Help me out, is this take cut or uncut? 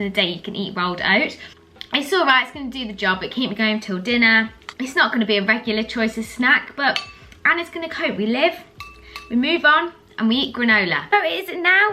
uncut